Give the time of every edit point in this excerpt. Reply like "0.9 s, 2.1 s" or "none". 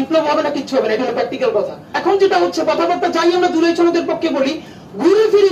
1.9 s